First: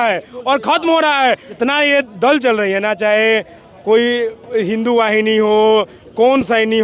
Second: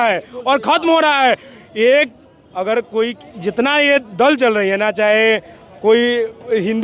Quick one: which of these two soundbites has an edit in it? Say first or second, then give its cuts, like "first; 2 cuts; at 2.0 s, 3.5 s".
first; 1 cut; at 1.5 s